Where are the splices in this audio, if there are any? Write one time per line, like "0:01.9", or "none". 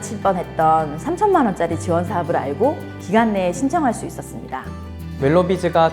0:04.7